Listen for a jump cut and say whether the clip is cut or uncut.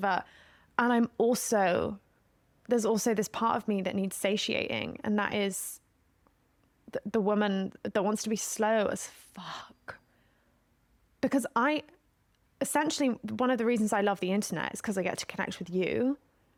uncut